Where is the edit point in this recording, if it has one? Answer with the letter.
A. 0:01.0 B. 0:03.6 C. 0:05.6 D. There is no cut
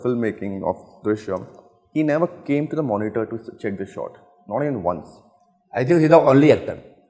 D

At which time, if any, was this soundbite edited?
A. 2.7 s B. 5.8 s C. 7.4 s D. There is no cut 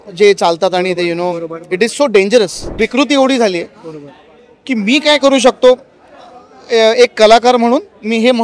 A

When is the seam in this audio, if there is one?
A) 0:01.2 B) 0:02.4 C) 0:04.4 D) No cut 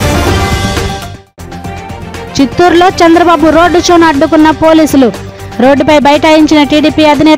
A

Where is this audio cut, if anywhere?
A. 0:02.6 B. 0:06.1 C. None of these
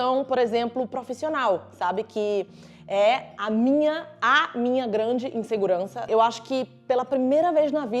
B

